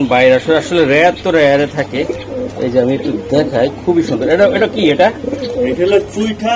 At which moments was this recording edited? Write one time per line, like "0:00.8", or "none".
none